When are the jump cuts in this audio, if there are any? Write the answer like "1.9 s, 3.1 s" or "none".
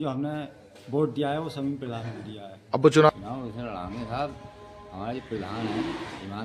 3.1 s